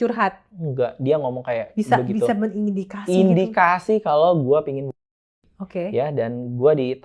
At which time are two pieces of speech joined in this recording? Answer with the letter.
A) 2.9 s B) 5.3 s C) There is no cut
C